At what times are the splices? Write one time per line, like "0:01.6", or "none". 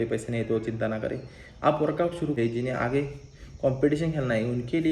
0:02.3